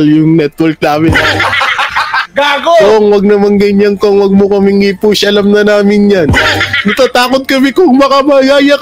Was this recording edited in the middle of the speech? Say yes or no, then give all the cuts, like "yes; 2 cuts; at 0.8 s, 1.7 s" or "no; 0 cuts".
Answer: no; 0 cuts